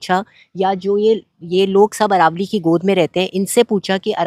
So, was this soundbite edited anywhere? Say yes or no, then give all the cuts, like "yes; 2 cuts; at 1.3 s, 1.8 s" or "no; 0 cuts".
no; 0 cuts